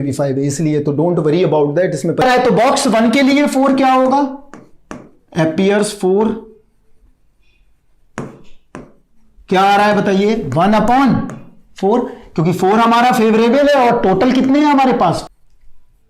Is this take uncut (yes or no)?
no